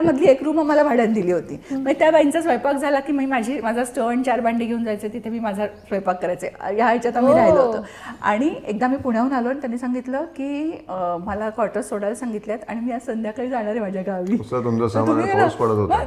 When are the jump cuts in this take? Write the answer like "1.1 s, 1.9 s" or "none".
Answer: none